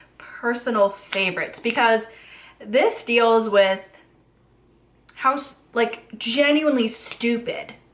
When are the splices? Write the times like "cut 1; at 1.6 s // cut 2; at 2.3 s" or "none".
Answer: none